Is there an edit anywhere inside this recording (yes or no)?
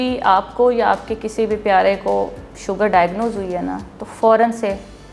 no